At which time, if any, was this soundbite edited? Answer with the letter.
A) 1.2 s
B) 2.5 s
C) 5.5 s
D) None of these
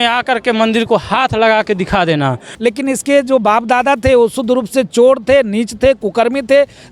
B